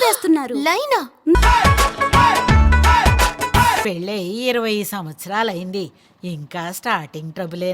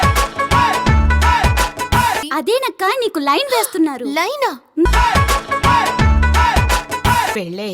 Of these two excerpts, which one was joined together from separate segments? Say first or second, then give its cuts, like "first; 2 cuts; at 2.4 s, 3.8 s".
second; 1 cut; at 2.2 s